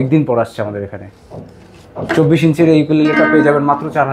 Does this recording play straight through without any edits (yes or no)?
yes